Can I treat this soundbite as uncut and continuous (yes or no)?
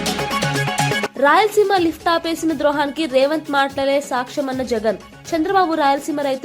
no